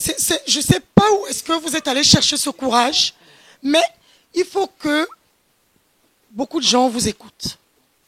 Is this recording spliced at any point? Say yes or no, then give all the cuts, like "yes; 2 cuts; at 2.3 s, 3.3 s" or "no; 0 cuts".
no; 0 cuts